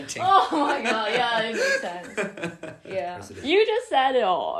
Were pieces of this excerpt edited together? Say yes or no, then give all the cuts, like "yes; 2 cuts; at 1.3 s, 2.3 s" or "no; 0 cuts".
yes; 1 cut; at 3.3 s